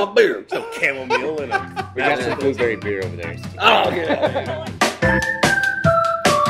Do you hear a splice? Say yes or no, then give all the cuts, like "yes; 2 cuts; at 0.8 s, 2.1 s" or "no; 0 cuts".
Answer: no; 0 cuts